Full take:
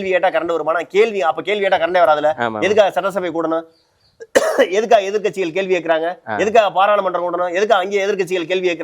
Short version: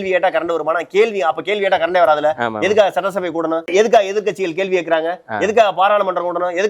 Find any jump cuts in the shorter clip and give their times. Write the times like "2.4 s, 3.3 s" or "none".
3.7 s